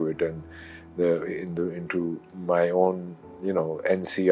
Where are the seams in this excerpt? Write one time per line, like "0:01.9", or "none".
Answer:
none